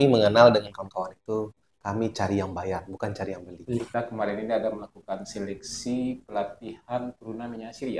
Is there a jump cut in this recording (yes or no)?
yes